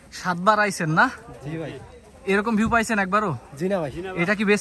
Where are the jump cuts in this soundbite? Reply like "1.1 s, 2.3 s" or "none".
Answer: none